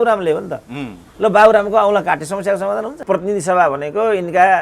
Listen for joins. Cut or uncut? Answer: cut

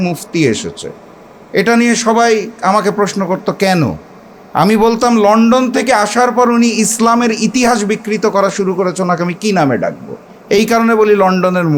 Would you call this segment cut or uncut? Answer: uncut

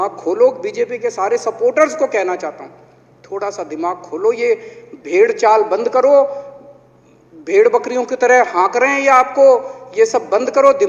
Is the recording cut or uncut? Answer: uncut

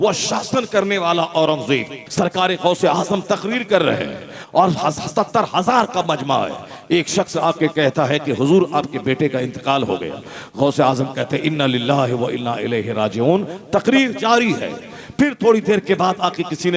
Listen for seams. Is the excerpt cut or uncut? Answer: cut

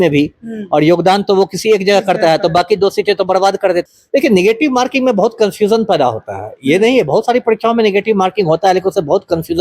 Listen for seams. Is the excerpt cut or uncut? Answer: cut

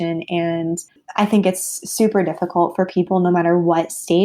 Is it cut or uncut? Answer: cut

